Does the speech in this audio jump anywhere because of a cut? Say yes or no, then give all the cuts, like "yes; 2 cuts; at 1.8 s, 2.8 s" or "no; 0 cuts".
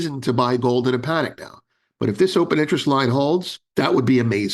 yes; 1 cut; at 3.6 s